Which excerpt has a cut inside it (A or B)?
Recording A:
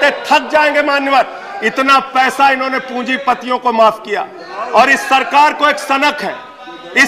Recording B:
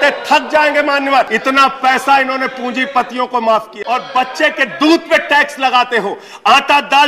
B